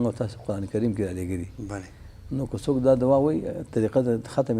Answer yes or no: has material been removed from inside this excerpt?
no